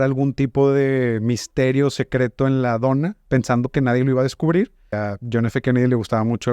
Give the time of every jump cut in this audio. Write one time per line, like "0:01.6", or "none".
0:05.0